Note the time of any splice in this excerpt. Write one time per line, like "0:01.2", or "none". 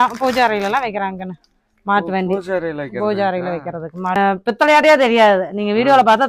0:04.2

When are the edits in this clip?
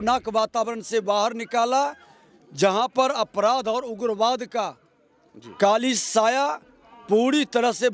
none

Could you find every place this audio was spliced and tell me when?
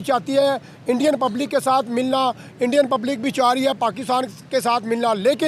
none

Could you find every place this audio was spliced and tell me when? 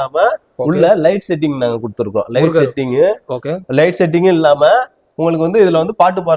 none

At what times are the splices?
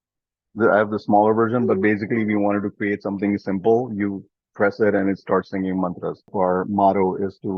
0:06.3

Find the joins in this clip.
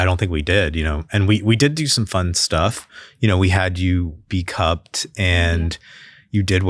none

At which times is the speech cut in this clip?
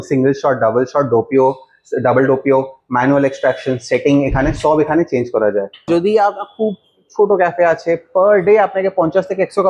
0:05.9

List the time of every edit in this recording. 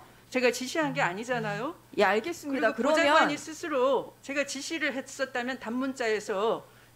0:04.2

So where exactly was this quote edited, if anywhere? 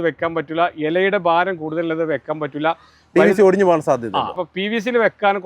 0:04.4

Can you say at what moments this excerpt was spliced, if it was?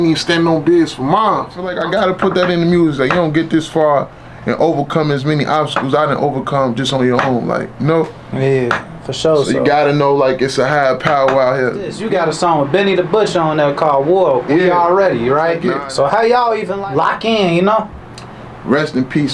0:01.7
0:12.0
0:15.7
0:16.8

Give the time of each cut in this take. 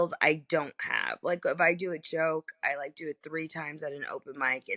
none

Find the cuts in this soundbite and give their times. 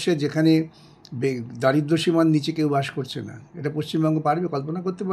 none

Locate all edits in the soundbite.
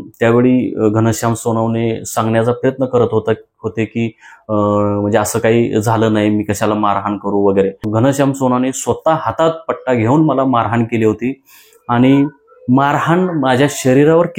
0:07.8

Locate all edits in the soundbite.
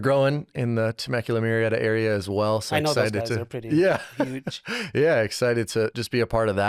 none

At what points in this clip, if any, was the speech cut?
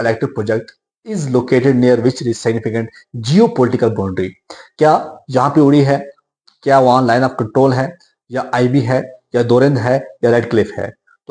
none

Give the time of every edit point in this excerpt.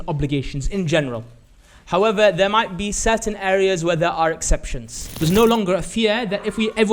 0:05.2

